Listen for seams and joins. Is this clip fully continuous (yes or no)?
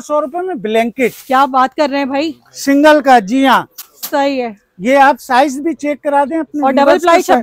yes